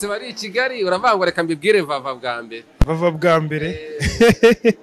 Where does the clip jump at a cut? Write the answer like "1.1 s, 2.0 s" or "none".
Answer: none